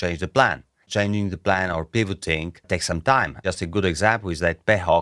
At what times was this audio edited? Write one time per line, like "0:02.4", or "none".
0:00.8
0:02.5
0:03.4